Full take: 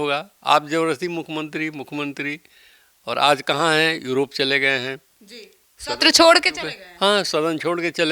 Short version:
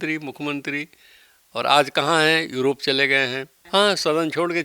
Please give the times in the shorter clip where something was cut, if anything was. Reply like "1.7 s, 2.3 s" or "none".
3.5 s